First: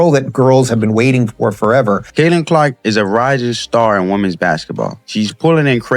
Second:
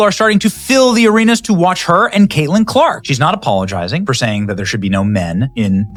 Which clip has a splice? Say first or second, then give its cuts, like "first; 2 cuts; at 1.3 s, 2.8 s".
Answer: first; 2 cuts; at 2.1 s, 5.0 s